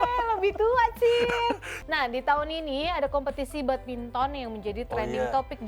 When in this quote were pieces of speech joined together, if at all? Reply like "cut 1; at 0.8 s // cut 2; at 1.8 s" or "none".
cut 1; at 1.7 s